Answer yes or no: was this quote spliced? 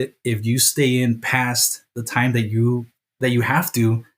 yes